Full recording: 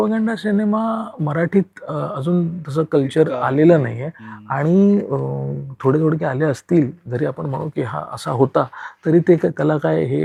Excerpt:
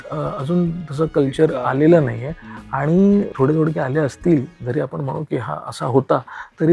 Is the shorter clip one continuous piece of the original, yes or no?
no